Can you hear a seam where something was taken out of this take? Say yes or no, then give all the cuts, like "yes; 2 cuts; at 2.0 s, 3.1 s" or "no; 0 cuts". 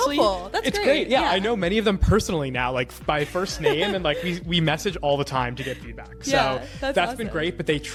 no; 0 cuts